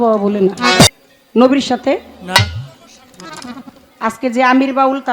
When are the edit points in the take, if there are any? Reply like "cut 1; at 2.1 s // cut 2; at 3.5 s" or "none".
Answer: cut 1; at 0.9 s